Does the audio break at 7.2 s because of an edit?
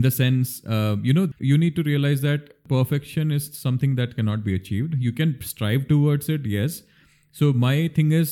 no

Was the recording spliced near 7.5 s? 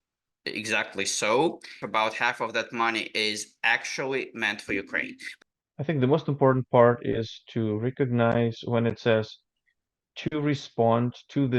no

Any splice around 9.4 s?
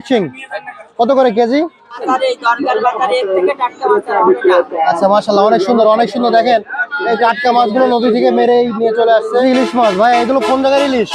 yes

